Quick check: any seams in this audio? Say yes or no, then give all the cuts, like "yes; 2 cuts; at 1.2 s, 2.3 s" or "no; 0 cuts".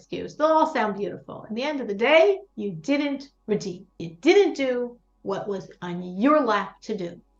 no; 0 cuts